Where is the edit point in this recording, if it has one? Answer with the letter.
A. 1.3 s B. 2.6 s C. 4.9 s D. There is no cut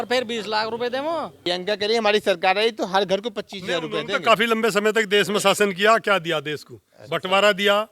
A